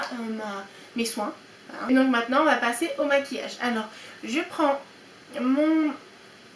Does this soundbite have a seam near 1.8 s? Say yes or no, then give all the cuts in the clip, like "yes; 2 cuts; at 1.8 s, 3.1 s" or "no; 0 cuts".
yes; 1 cut; at 1.8 s